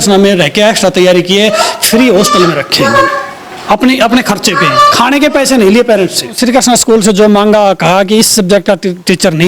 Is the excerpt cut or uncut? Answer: cut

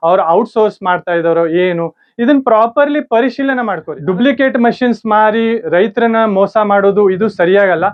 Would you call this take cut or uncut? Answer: uncut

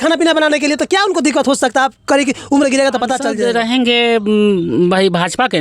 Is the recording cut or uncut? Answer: cut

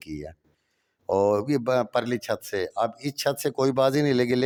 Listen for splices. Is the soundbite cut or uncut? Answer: uncut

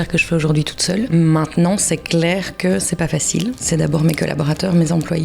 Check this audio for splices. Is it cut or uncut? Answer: cut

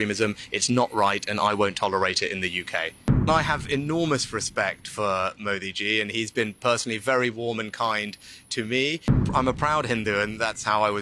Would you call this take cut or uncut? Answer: cut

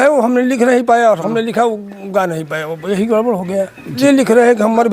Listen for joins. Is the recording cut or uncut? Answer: cut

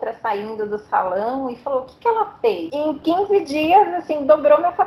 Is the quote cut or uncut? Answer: cut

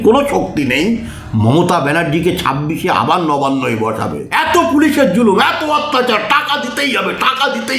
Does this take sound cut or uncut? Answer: cut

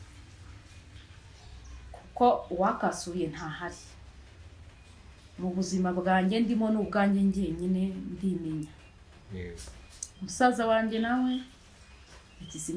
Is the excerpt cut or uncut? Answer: uncut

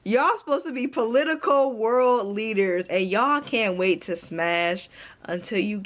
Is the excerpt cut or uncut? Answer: uncut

